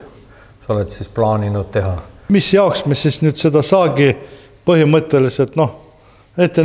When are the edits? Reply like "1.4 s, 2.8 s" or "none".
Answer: 2.2 s